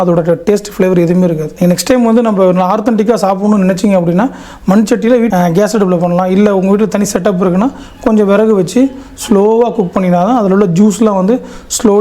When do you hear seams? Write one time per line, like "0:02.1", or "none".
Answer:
none